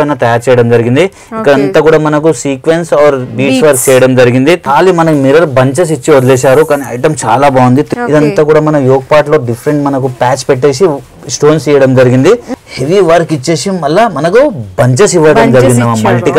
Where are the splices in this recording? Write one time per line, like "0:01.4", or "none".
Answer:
0:04.6
0:07.9
0:12.5